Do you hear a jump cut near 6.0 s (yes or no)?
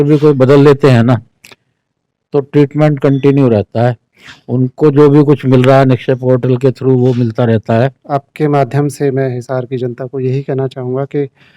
no